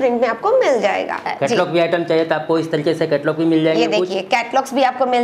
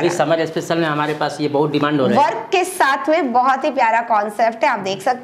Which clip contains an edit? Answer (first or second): first